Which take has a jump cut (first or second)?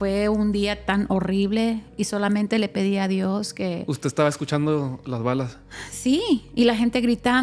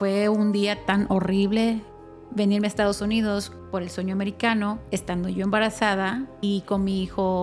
second